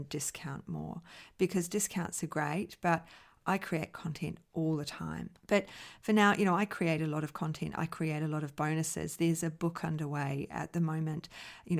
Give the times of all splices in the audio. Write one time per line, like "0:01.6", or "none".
0:05.3